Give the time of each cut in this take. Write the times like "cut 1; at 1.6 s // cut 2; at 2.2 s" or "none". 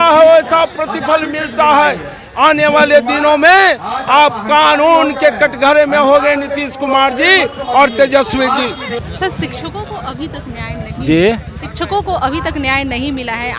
none